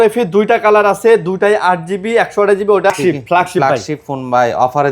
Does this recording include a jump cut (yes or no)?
yes